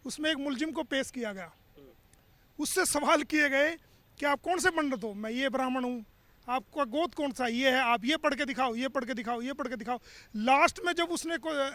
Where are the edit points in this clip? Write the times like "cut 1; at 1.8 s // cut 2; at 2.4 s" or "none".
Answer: none